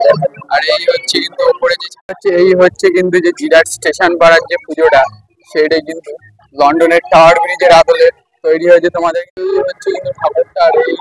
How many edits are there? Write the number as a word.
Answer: two